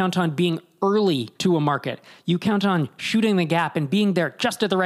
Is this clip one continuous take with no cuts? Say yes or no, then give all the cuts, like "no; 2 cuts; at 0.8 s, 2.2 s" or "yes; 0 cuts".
no; 1 cut; at 1.3 s